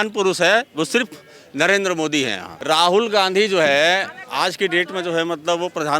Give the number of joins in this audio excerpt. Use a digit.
1